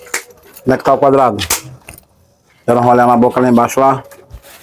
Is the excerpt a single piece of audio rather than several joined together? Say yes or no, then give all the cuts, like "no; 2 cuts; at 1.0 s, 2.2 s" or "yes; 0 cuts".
yes; 0 cuts